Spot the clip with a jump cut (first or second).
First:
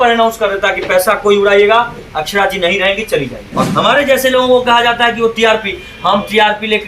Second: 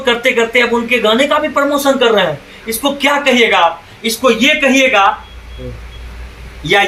first